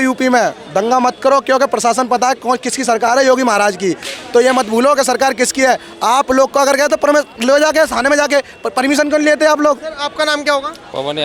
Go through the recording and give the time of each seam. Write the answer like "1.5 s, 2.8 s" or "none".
none